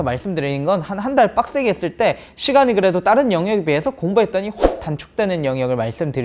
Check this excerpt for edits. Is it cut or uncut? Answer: uncut